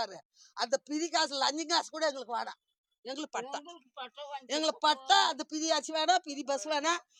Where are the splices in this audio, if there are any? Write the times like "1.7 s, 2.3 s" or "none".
none